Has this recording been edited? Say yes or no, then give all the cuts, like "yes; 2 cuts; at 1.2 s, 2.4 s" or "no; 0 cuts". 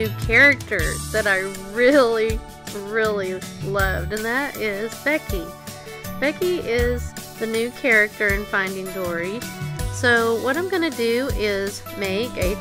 yes; 1 cut; at 8.7 s